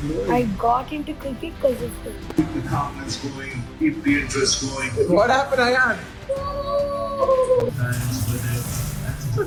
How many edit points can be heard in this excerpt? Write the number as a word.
zero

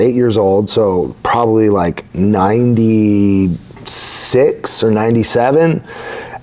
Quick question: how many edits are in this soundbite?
zero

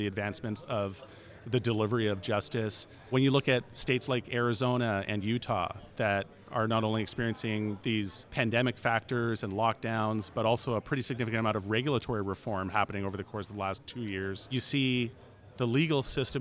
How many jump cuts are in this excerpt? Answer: four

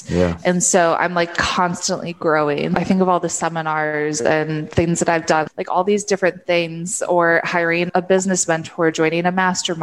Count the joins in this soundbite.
three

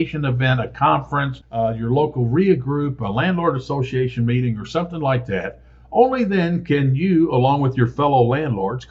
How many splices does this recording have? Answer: zero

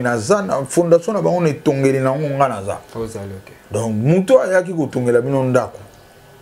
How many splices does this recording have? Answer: zero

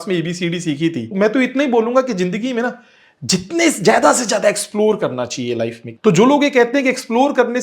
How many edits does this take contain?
two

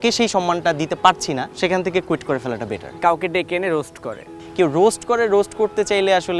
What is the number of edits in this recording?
three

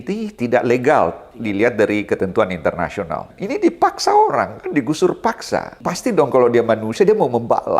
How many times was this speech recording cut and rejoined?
two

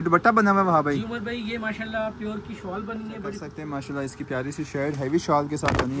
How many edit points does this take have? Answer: one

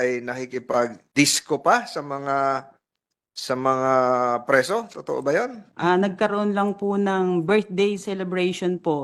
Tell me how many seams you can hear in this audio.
two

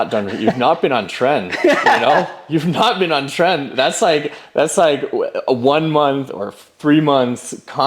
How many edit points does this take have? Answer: zero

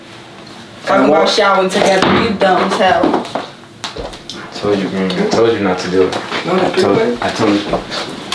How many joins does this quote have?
zero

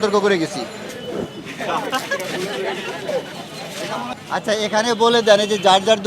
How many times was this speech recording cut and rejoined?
one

